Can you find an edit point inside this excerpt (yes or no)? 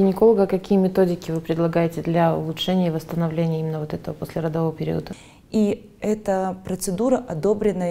yes